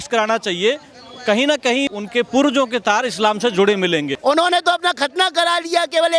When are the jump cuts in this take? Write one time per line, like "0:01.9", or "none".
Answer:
0:01.9
0:04.1